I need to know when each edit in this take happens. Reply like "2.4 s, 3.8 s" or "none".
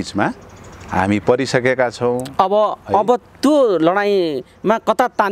none